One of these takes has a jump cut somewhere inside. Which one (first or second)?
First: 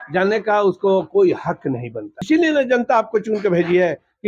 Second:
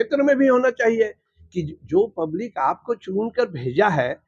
first